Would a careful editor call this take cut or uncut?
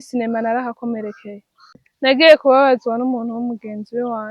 cut